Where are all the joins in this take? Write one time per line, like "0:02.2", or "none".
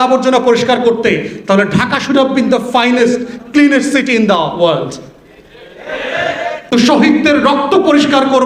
0:06.7